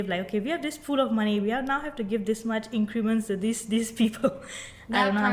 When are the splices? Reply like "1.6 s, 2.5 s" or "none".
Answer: none

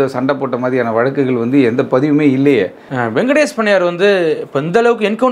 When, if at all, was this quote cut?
2.8 s

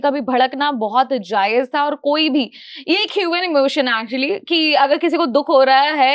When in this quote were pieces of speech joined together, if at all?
none

